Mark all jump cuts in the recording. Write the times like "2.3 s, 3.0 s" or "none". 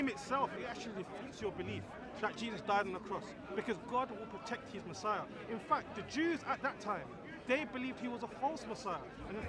none